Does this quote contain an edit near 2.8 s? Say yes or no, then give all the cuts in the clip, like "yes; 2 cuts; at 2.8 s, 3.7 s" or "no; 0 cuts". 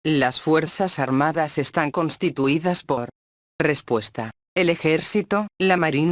yes; 2 cuts; at 2.8 s, 4.6 s